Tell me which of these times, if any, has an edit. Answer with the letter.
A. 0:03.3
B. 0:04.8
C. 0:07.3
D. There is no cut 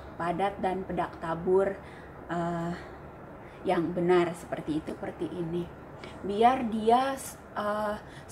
B